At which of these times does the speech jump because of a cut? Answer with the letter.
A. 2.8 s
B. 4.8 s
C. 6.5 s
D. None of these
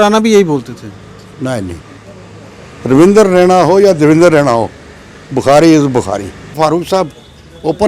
C